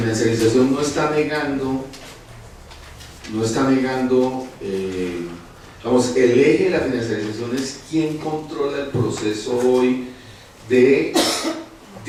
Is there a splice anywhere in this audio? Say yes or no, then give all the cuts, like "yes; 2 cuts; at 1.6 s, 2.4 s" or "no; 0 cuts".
no; 0 cuts